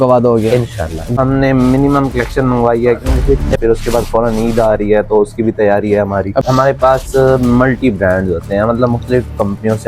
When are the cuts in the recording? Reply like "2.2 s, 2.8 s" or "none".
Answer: 1.1 s, 3.6 s, 6.4 s